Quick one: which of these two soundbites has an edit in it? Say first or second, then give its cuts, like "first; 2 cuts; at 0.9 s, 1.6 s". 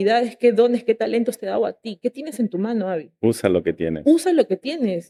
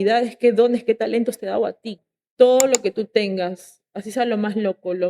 second; 1 cut; at 1.9 s